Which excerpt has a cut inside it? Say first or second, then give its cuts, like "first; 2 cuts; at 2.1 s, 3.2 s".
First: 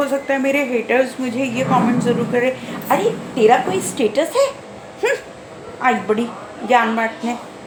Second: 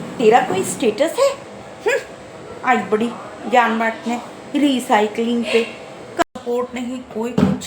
second; 1 cut; at 6.2 s